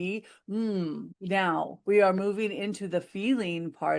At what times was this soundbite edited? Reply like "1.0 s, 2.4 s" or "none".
1.1 s